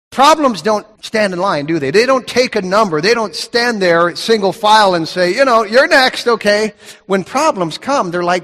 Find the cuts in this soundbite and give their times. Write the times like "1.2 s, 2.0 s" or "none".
1.0 s, 3.2 s